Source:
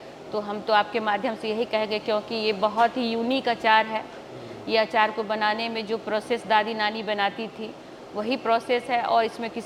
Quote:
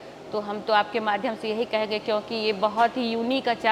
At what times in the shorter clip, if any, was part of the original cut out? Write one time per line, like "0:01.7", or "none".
none

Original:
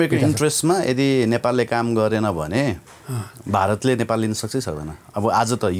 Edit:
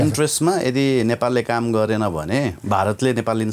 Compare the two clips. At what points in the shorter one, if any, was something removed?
0:02.6

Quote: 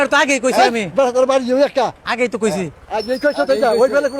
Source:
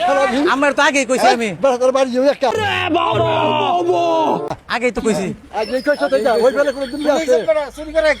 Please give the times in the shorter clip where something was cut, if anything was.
0:01.9

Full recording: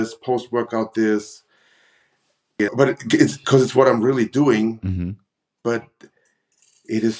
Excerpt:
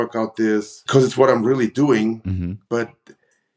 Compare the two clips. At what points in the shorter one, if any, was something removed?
0:00.8
0:02.6

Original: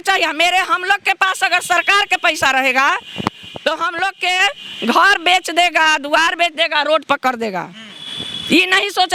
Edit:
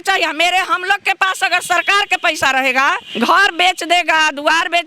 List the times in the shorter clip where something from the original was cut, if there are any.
0:03.0

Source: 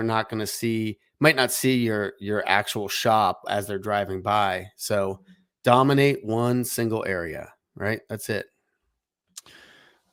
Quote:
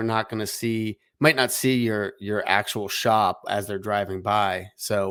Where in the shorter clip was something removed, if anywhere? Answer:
none

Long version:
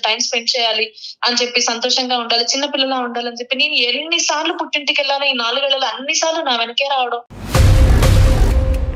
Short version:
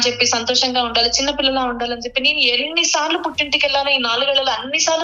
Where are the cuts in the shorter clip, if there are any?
none

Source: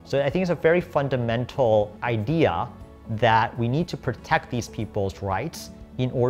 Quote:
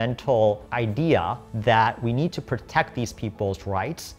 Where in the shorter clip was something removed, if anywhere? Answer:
0:01.4

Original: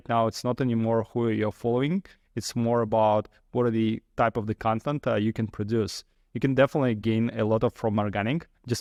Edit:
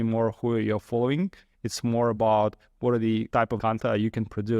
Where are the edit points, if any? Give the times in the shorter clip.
0:03.5

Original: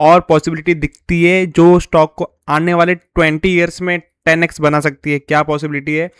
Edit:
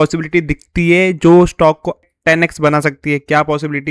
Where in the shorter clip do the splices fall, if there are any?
0:02.1

